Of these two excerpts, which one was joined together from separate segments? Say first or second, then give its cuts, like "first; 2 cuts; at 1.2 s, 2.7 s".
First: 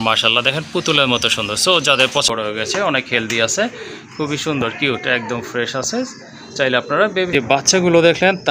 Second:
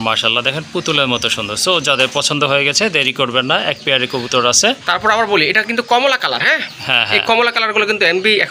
first; 2 cuts; at 2.3 s, 7.4 s